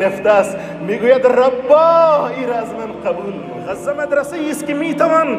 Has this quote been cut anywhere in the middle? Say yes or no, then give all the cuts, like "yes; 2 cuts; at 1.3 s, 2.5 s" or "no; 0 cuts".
yes; 1 cut; at 3.7 s